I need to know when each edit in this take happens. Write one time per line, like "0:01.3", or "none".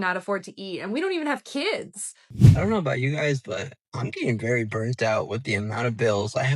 0:02.2